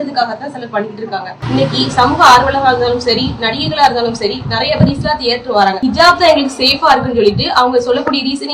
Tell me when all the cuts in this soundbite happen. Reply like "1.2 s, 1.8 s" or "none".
5.8 s

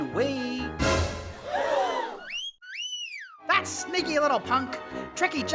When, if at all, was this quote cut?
none

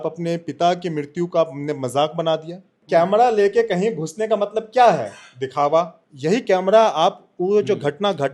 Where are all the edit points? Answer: 2.7 s, 6.0 s

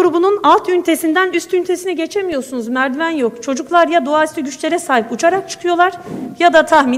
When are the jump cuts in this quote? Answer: none

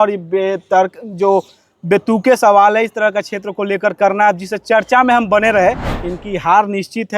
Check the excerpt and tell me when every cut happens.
5.9 s

